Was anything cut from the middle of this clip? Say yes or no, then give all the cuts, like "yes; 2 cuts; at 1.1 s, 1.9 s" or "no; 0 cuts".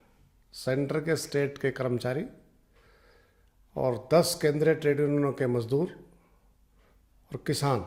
no; 0 cuts